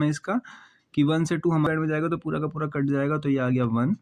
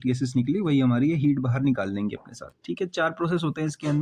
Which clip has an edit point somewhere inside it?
first; 1 cut; at 1.7 s

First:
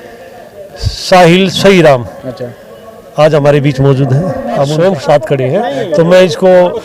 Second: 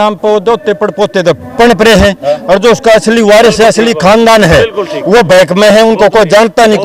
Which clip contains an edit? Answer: first; 1 cut; at 4.7 s

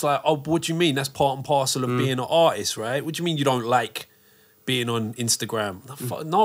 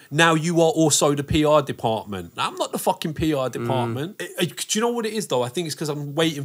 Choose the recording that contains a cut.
second; 1 cut; at 4.2 s

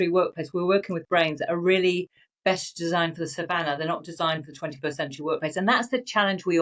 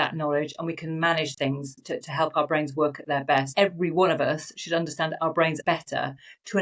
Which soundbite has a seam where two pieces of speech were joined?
second; 2 cuts; at 3.5 s, 5.6 s

